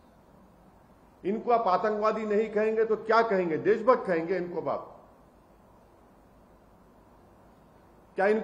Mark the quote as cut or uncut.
uncut